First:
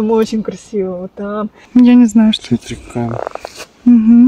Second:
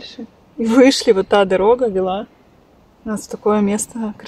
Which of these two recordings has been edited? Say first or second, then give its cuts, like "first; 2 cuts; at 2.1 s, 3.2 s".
first; 1 cut; at 1.6 s